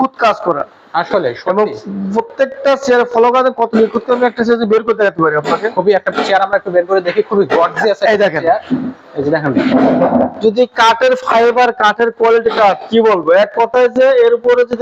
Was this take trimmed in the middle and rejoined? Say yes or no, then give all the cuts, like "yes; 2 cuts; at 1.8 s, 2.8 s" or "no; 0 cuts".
no; 0 cuts